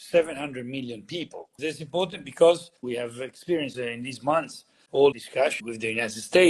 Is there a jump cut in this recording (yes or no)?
yes